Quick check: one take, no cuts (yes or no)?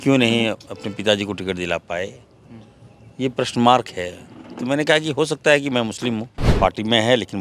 no